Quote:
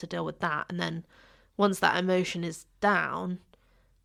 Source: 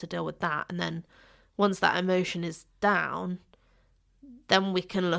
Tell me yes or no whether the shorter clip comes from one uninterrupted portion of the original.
yes